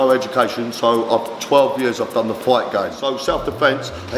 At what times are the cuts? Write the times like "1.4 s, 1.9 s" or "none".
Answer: 3.0 s